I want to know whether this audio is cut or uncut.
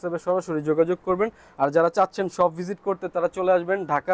uncut